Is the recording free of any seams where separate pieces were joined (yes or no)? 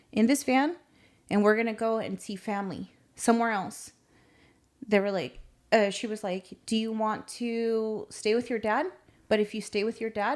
yes